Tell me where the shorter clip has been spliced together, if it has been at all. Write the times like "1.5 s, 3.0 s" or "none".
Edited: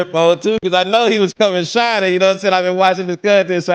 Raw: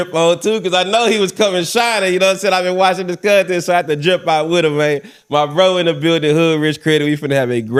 none